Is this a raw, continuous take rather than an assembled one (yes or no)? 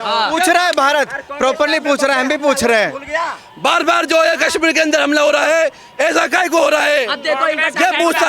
yes